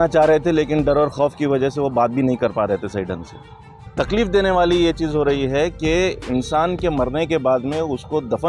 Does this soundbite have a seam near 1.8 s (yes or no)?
no